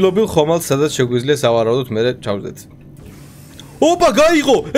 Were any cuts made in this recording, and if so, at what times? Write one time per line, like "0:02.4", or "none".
none